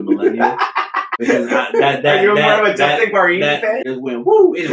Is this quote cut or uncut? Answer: cut